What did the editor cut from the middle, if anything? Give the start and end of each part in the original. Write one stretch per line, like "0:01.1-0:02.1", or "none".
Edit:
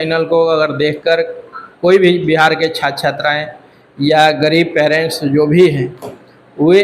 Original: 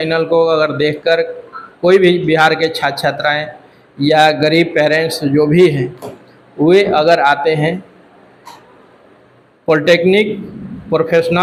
none